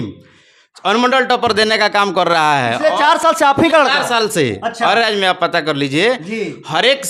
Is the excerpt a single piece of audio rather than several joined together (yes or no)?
yes